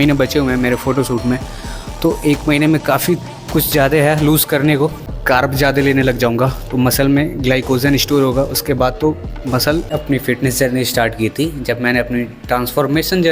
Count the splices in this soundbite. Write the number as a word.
two